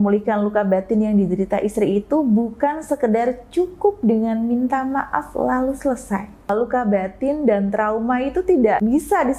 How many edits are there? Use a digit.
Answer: 1